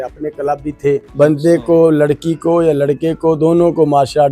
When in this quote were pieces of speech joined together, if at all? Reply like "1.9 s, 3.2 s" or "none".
1.1 s

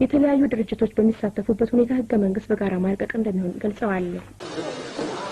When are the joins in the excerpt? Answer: 4.4 s

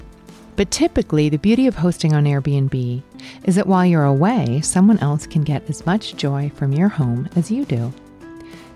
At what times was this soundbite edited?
none

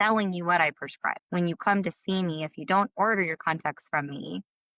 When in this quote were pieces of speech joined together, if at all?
1.1 s

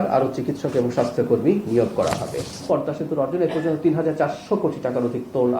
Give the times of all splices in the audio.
2.6 s

